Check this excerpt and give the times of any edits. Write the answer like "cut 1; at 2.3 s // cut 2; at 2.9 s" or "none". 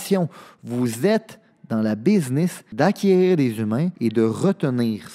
cut 1; at 2.6 s // cut 2; at 3.9 s